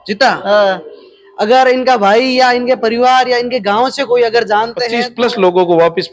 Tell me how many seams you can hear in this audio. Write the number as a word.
one